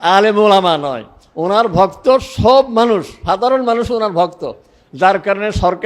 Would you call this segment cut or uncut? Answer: uncut